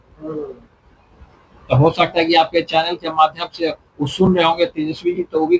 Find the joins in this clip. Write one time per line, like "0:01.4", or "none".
none